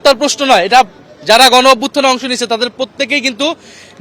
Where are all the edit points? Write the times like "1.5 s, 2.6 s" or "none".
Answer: none

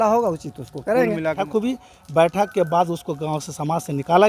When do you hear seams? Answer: 1.4 s

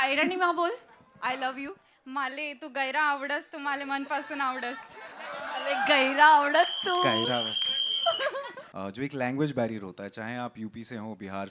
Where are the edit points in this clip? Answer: 8.6 s

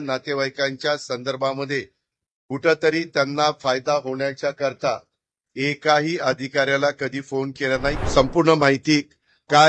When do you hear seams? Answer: 8.0 s

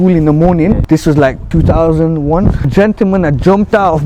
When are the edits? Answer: 1.2 s, 2.7 s

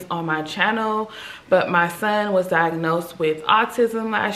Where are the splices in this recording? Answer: none

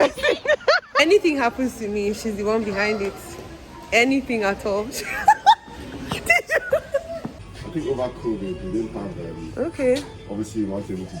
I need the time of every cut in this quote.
1.0 s, 7.3 s

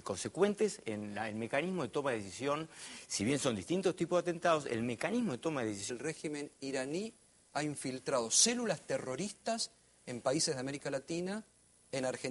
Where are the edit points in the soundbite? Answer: none

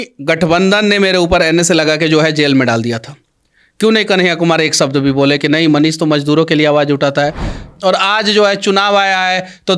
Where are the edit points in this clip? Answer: 7.7 s

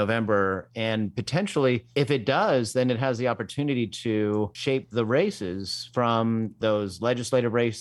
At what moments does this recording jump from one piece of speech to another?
1.9 s, 4.5 s, 6.6 s

